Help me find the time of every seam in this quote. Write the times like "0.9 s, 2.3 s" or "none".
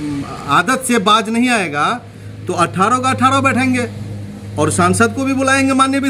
none